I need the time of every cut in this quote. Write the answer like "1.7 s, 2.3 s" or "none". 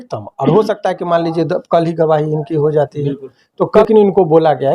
3.8 s